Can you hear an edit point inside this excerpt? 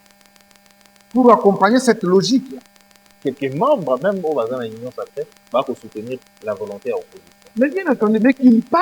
yes; 1 cut; at 3.1 s

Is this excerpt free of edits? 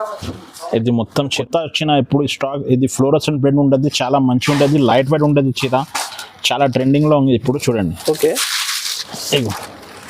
no; 1 cut; at 1.4 s

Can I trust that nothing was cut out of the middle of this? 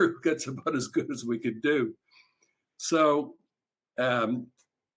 yes; 0 cuts

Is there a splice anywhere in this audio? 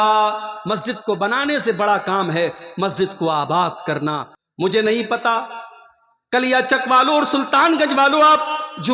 yes; 1 cut; at 4.3 s

